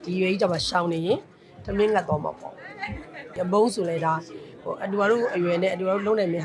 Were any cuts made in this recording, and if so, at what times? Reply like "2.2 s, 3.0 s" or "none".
3.3 s